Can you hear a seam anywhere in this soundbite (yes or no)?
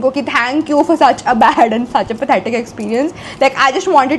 no